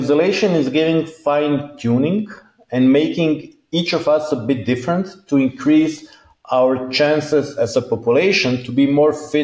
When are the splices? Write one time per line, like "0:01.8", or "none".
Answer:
none